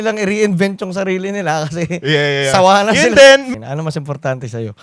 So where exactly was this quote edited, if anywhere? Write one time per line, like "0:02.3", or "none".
0:03.5

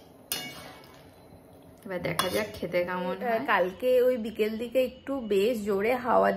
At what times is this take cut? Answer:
0:03.2

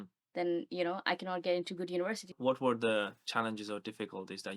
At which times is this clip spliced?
0:02.4

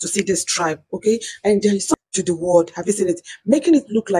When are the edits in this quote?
0:01.9

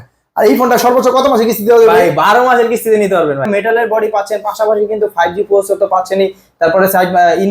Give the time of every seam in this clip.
0:03.5

